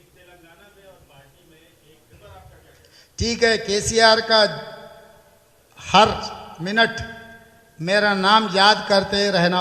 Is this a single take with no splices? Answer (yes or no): no